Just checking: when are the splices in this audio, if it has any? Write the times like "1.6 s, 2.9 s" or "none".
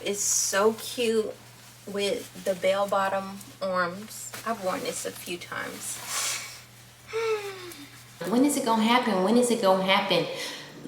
8.2 s